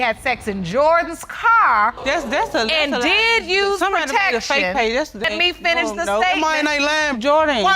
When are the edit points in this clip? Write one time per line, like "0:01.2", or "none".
0:02.0
0:05.2